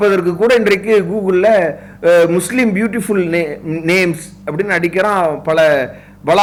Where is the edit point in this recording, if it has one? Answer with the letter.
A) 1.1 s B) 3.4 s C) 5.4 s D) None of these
D